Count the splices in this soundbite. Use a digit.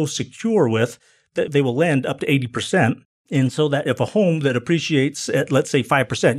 1